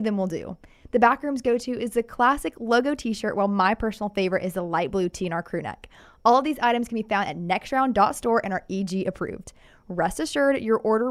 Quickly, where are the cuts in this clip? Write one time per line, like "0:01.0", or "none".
none